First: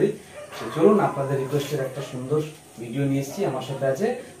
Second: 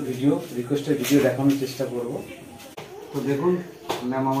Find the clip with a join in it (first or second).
second